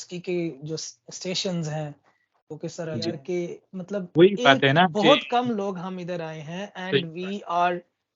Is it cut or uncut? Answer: cut